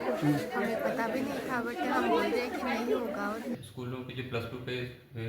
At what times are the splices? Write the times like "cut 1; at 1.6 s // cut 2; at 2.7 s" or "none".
cut 1; at 3.6 s